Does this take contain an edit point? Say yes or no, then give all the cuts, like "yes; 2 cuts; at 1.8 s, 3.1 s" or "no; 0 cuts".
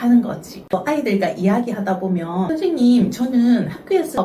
yes; 2 cuts; at 0.7 s, 2.5 s